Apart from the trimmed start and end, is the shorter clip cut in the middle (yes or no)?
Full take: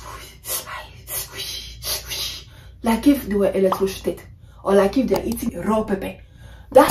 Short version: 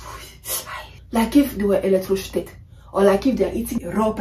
yes